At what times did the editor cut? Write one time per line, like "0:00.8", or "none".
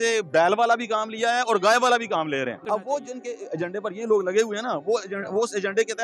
0:02.6

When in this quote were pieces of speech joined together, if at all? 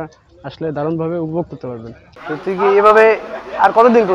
0:02.2

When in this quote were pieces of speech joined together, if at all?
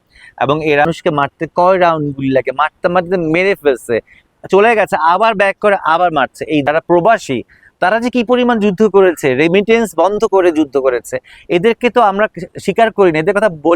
0:00.8
0:06.7

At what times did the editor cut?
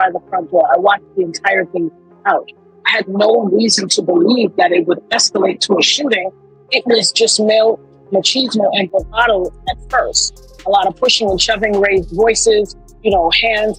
none

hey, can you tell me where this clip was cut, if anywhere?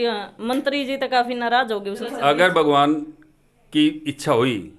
0:02.0

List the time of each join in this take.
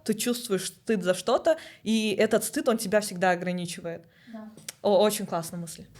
none

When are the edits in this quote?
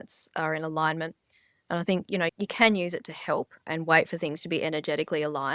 0:02.3
0:03.7

